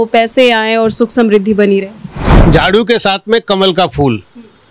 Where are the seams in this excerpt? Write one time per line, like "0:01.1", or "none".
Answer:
none